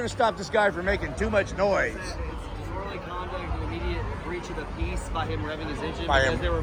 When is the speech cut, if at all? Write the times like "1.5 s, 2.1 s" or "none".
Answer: none